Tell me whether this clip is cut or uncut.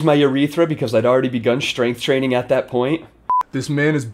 cut